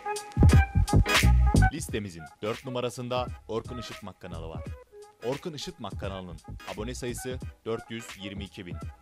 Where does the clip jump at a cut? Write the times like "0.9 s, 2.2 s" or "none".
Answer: 1.7 s